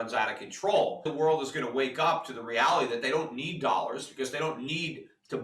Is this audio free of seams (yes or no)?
no